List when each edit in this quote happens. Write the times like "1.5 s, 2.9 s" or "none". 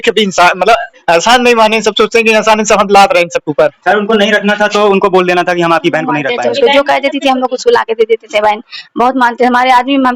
6.3 s